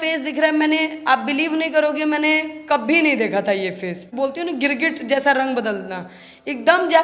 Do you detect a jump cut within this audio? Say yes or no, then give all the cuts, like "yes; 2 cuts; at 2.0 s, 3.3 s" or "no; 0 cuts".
yes; 1 cut; at 4.1 s